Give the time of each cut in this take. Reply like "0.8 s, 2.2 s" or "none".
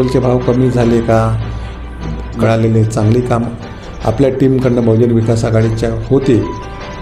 2.3 s